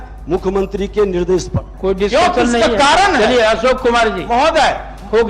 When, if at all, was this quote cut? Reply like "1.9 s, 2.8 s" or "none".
1.7 s